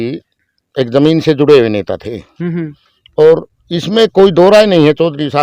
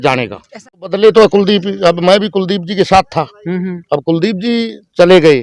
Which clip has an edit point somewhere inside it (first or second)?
second